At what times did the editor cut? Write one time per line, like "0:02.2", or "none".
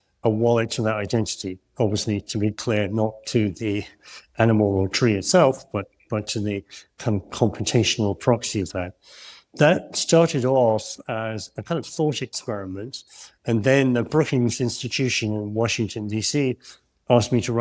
none